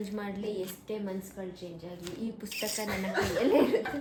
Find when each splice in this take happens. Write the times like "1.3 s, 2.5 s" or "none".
none